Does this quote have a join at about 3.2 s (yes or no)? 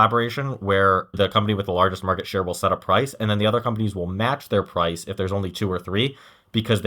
no